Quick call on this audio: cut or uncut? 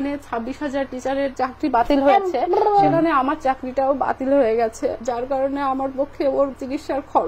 uncut